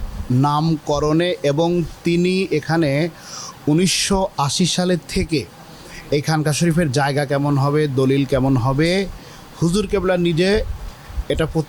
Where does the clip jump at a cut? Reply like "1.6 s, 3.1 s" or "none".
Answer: none